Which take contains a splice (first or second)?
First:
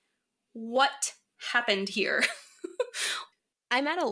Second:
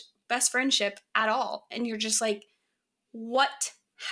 first